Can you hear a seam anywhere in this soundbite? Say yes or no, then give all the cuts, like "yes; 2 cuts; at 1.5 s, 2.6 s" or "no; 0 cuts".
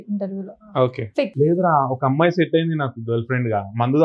yes; 1 cut; at 1.3 s